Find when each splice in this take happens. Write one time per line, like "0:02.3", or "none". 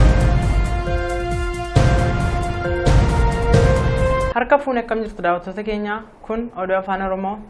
0:01.5